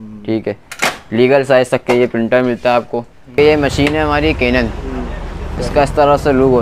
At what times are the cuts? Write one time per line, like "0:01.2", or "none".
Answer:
0:03.2